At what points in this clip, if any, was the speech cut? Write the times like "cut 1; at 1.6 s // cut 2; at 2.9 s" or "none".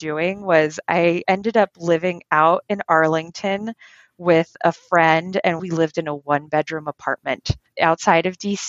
cut 1; at 5.6 s // cut 2; at 7.7 s